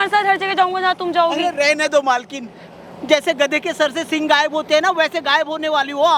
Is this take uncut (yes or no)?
yes